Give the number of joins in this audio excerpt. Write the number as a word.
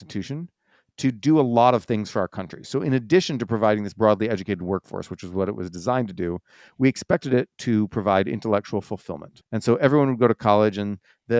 zero